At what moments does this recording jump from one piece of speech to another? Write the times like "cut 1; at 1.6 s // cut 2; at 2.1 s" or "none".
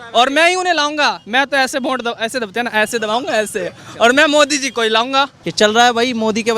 cut 1; at 5.4 s